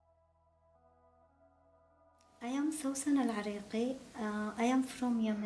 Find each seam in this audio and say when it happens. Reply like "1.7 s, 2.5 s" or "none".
2.4 s